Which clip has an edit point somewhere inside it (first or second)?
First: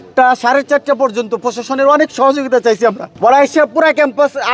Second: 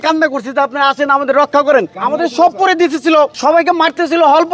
second